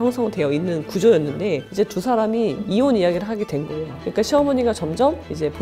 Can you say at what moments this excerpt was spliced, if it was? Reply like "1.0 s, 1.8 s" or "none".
none